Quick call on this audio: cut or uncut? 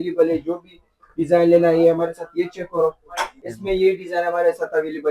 cut